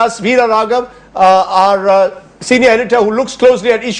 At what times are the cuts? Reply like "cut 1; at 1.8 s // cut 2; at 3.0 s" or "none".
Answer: cut 1; at 2.5 s

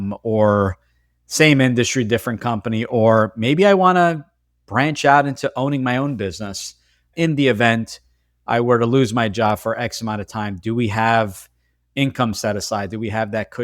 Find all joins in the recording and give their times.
cut 1; at 7.1 s

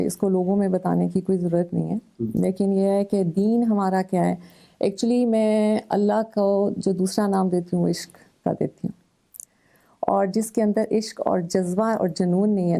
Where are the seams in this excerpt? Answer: none

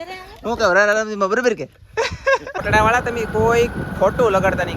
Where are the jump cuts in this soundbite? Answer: cut 1; at 2.5 s

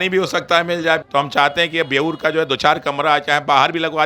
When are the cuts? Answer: cut 1; at 1.0 s

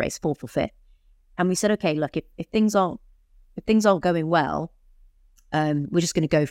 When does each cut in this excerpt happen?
none

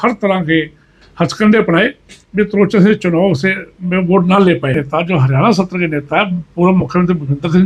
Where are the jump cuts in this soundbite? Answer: cut 1; at 4.8 s

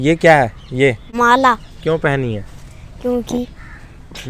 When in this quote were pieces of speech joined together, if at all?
cut 1; at 1.0 s

